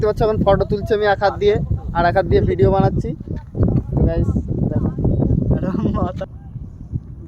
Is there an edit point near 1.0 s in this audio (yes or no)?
no